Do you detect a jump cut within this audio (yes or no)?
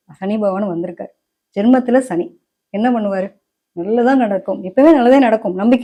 no